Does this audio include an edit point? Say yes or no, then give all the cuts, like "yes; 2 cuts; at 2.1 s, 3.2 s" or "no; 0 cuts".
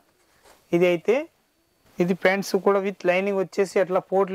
yes; 1 cut; at 1.8 s